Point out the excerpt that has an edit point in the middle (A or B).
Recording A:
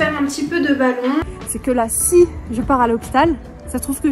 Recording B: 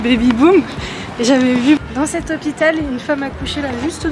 A